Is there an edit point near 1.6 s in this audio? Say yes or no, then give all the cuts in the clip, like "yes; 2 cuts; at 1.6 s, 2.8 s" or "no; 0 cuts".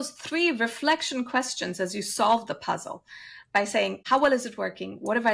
no; 1 cut; at 4.0 s